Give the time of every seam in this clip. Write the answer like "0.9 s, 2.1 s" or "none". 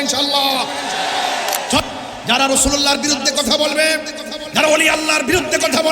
1.9 s